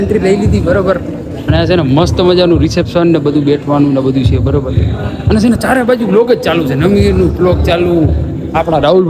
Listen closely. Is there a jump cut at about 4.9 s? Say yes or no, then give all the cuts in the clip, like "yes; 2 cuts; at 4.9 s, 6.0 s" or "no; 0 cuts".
no; 0 cuts